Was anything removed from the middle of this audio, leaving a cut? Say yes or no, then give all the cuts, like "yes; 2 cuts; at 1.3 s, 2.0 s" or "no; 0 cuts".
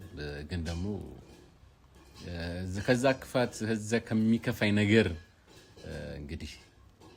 no; 0 cuts